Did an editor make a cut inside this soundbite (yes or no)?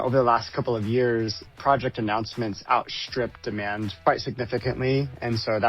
yes